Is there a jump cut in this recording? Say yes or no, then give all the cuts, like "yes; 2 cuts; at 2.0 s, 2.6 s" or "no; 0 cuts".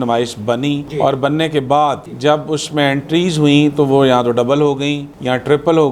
no; 0 cuts